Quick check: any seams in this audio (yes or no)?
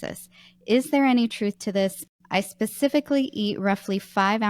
yes